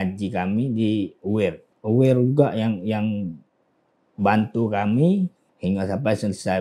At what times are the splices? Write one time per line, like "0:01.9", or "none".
0:01.7
0:05.5